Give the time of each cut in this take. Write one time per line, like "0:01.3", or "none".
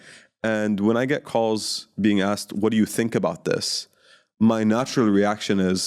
none